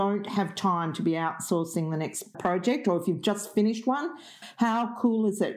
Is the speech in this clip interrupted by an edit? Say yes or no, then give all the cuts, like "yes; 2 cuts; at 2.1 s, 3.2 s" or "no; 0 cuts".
yes; 2 cuts; at 2.4 s, 4.4 s